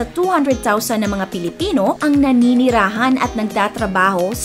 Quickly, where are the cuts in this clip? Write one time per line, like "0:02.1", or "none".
none